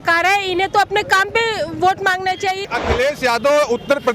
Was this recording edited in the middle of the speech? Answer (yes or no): yes